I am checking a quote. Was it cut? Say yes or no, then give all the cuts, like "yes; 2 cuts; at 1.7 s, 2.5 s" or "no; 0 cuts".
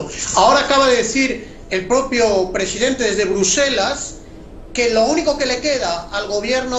no; 0 cuts